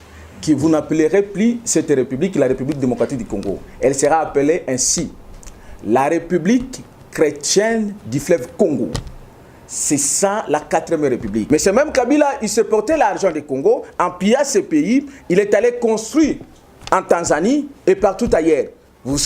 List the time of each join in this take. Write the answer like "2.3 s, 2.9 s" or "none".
11.4 s